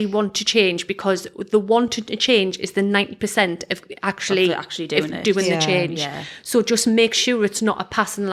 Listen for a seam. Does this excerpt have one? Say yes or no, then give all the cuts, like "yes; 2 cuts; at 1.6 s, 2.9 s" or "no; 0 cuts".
no; 0 cuts